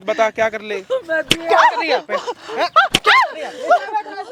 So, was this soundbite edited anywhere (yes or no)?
no